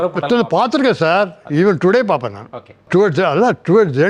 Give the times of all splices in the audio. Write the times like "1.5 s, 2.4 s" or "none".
2.9 s